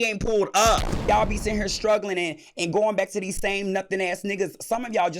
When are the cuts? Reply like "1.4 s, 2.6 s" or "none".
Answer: 1.0 s